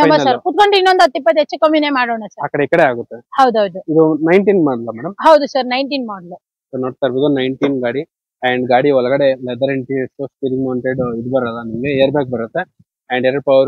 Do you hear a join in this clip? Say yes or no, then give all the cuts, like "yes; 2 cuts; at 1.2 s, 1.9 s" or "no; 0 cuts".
no; 0 cuts